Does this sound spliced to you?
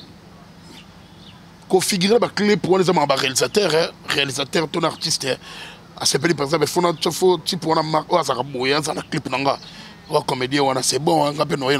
no; 0 cuts

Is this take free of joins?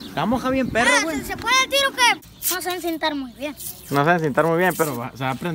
no; 1 cut; at 2.3 s

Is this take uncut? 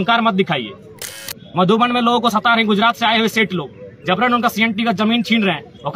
no; 1 cut; at 1.3 s

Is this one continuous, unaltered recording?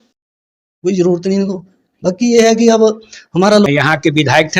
no; 1 cut; at 3.7 s

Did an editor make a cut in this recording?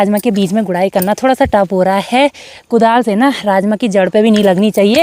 no; 0 cuts

